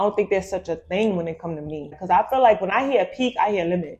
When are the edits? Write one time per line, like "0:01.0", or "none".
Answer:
0:02.0